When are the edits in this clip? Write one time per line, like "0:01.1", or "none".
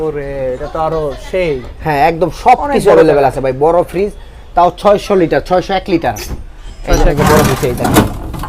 0:07.1